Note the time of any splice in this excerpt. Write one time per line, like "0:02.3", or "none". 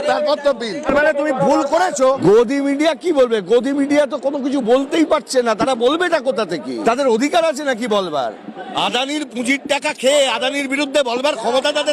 0:00.9
0:02.1
0:06.7
0:08.7